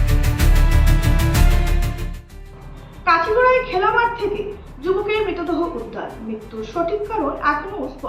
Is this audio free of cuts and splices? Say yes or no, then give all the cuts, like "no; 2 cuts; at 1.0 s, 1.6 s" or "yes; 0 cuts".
no; 1 cut; at 1.9 s